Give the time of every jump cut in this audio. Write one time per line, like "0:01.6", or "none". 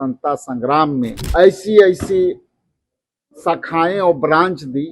0:01.2